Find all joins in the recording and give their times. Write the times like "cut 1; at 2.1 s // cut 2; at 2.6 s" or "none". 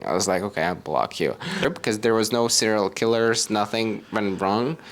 cut 1; at 1.6 s